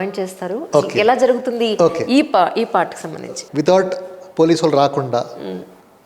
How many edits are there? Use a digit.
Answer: 1